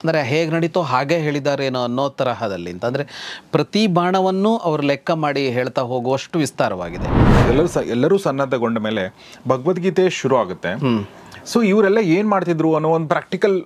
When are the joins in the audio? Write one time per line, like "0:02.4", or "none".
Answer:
0:07.1